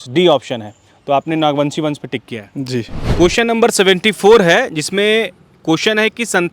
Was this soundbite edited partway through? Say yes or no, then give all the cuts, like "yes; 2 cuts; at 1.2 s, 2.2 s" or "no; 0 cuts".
yes; 1 cut; at 3.0 s